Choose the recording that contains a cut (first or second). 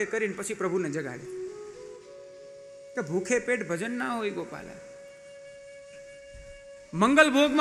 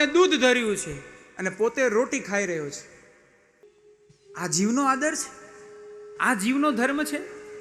second